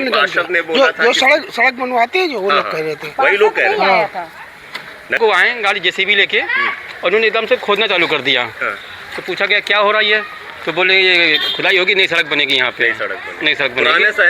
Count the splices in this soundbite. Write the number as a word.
one